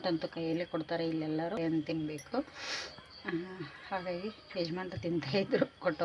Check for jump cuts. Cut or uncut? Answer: cut